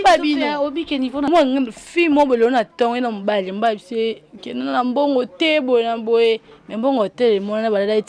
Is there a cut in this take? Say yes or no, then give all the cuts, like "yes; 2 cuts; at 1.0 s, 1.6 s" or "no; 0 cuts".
yes; 1 cut; at 1.3 s